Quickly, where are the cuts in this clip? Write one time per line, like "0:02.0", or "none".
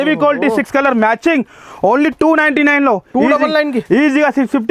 none